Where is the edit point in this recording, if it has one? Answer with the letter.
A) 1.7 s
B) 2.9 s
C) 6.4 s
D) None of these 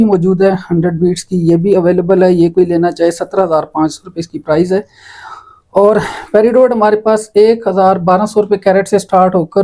D